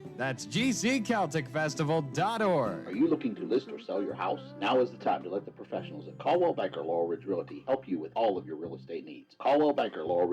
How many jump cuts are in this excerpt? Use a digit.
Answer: 1